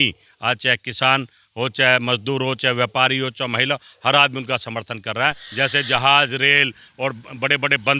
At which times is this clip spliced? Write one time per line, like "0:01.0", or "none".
0:05.4